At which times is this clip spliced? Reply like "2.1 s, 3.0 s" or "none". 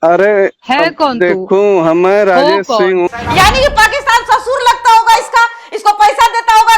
3.1 s